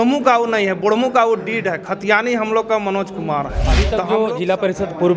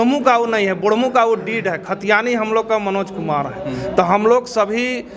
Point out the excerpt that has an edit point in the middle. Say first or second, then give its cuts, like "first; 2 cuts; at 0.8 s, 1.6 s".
first; 1 cut; at 3.8 s